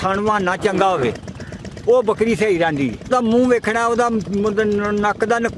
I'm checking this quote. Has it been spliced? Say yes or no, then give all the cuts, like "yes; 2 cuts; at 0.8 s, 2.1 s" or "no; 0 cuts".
yes; 1 cut; at 3.1 s